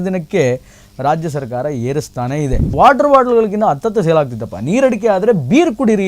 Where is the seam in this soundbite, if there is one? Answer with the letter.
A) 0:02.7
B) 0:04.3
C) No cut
A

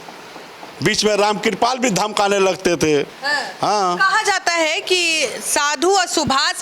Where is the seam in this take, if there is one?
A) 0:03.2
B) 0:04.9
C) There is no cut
A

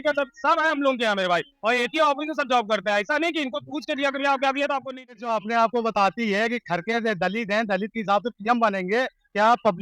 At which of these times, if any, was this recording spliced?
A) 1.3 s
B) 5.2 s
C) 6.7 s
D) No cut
B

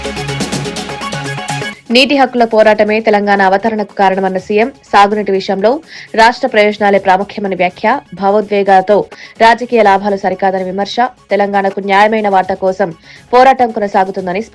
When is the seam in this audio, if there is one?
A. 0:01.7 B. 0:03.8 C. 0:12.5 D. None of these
A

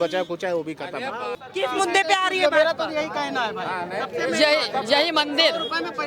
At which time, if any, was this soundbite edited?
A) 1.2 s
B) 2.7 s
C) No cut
A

